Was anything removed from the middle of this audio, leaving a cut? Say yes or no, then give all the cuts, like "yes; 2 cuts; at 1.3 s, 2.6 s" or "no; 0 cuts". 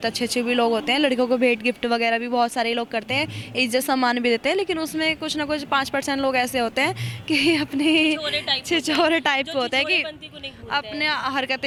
no; 0 cuts